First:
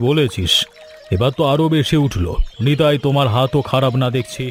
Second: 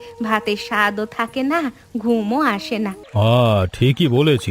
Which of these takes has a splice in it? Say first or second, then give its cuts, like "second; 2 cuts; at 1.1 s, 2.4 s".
second; 1 cut; at 3.0 s